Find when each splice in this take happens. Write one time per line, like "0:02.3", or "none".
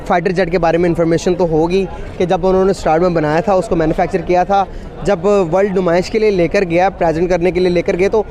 none